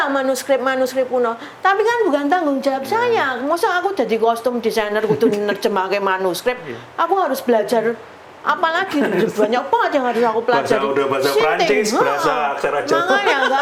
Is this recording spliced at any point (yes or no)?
no